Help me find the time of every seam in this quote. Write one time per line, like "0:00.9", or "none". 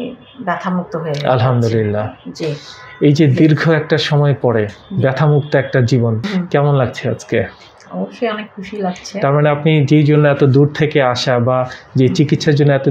0:06.2